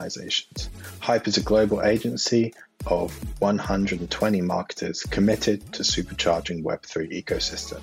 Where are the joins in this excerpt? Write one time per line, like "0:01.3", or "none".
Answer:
none